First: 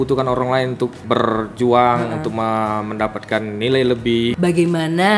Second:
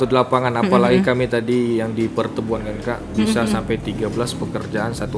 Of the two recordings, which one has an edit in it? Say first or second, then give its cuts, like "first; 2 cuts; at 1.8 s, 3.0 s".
first; 2 cuts; at 1.0 s, 4.3 s